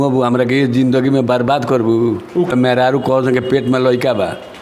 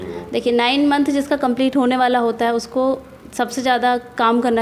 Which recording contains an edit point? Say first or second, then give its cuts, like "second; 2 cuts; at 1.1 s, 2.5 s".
first; 1 cut; at 2.5 s